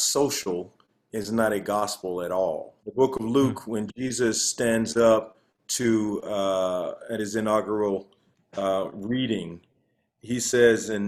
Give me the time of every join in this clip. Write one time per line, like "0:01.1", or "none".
0:02.8